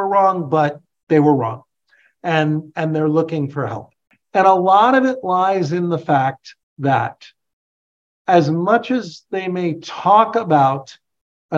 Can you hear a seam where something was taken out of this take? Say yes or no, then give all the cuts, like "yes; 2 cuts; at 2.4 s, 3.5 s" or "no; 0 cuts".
no; 0 cuts